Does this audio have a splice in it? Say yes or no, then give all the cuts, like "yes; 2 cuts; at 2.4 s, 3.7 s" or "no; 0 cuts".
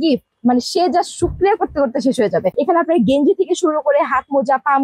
no; 0 cuts